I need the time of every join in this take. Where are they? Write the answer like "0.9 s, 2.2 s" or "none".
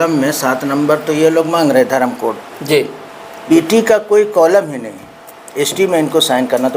3.3 s